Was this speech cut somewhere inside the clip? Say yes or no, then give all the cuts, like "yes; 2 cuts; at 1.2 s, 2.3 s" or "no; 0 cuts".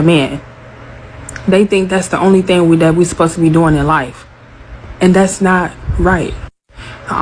no; 0 cuts